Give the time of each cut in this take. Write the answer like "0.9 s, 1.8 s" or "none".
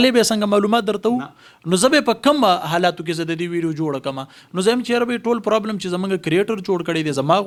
none